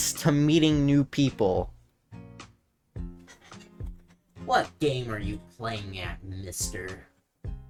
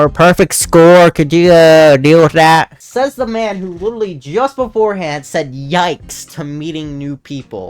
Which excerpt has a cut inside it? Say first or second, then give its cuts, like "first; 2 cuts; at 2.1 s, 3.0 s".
second; 1 cut; at 2.8 s